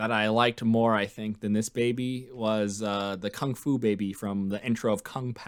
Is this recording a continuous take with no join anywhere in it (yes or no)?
yes